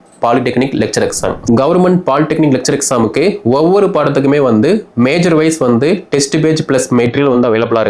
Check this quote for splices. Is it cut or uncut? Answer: cut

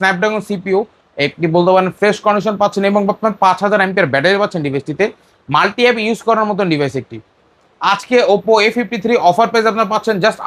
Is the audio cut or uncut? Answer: uncut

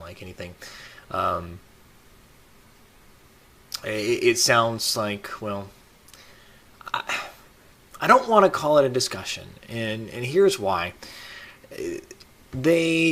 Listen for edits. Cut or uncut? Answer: cut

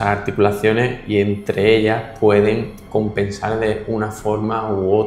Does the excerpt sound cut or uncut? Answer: uncut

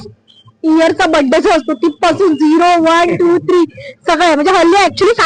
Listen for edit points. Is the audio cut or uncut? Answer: uncut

